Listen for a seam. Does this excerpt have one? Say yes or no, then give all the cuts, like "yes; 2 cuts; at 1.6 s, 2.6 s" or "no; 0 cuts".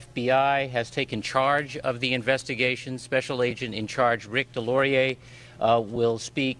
no; 0 cuts